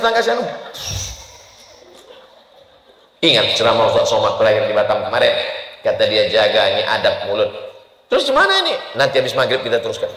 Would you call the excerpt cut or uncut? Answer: uncut